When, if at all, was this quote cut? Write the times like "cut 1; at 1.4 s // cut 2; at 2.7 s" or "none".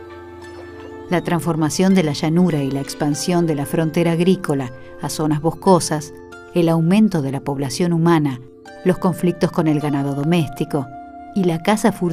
none